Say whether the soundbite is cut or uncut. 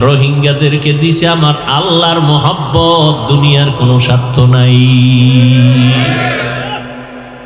uncut